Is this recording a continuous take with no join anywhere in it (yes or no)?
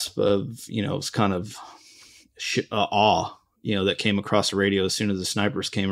yes